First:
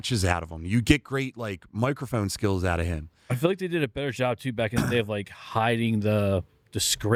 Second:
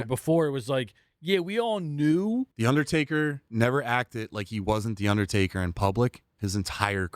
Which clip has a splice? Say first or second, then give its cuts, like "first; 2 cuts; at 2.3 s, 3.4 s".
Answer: second; 1 cut; at 2.5 s